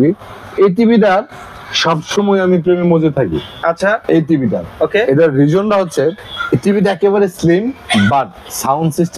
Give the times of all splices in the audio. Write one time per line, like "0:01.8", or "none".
none